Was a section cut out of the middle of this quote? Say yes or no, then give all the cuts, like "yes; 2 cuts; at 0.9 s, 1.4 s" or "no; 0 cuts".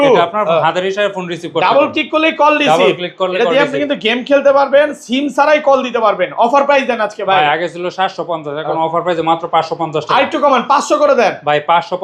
no; 0 cuts